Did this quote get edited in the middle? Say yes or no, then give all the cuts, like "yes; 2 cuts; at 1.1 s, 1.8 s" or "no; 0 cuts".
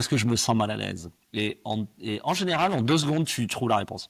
no; 0 cuts